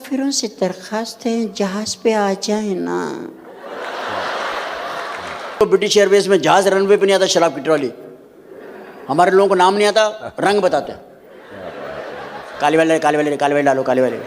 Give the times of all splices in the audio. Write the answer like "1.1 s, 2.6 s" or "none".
5.6 s